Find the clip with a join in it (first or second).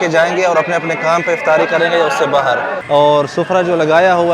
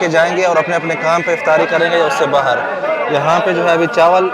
first